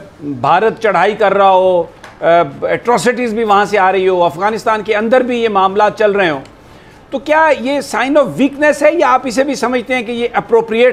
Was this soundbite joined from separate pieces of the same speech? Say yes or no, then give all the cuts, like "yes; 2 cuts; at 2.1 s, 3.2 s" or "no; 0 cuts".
no; 0 cuts